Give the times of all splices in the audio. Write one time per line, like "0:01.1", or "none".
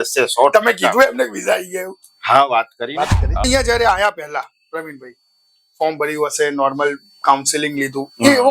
0:03.4